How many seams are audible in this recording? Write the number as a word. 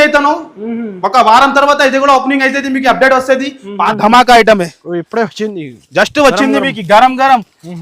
one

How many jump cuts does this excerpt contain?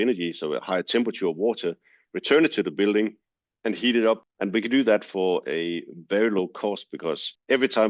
one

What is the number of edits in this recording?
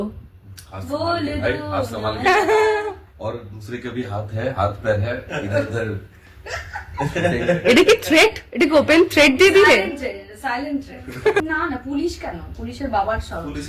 one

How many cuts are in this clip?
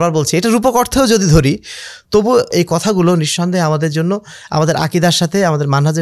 one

